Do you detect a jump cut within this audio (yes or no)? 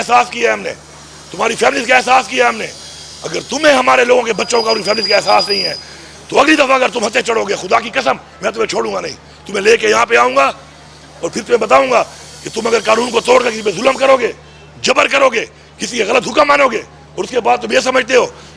no